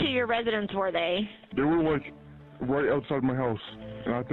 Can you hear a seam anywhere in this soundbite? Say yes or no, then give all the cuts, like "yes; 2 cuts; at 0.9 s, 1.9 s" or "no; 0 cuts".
yes; 1 cut; at 1.4 s